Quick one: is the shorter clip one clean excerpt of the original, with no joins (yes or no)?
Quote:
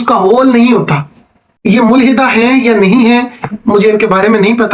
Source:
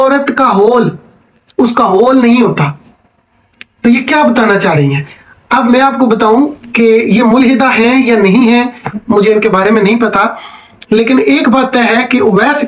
no